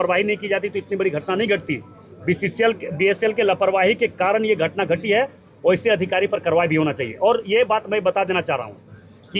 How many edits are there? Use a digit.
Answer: 0